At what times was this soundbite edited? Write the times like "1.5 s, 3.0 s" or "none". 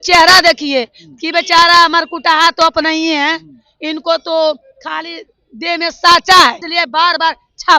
6.7 s